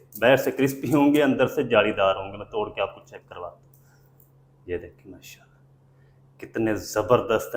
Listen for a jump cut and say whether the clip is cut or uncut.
uncut